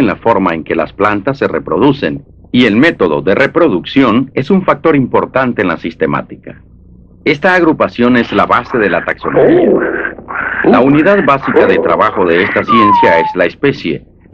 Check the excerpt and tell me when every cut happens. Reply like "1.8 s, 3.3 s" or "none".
8.8 s

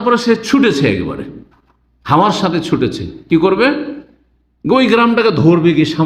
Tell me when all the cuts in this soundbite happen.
none

